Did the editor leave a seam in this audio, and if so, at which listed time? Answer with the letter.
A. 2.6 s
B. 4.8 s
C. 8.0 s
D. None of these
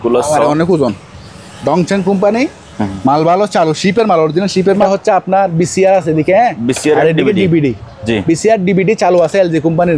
B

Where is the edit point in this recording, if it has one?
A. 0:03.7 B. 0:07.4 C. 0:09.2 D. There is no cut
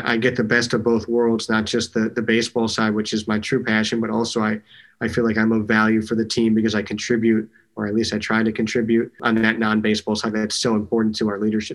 C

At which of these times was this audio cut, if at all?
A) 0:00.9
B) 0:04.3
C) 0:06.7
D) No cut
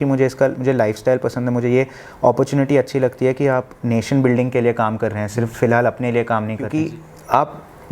C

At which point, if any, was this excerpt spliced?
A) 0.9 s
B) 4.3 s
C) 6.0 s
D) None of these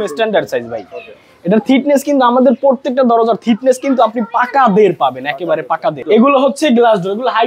C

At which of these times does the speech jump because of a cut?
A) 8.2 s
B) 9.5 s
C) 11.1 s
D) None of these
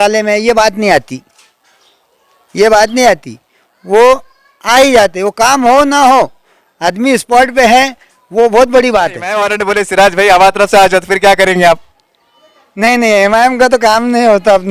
B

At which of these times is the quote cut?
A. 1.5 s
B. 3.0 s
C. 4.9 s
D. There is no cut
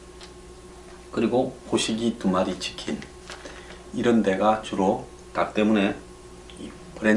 D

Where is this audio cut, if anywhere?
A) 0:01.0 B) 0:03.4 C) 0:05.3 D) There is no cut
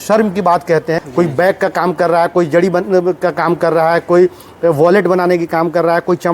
A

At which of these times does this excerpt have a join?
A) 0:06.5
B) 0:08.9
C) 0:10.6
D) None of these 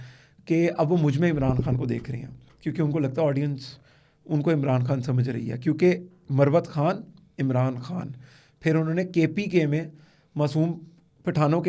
D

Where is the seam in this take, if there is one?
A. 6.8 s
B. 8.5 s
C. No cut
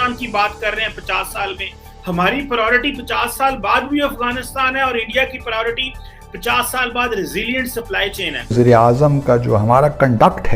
B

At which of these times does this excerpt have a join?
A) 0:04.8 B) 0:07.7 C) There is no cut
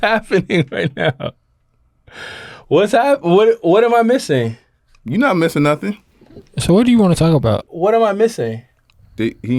B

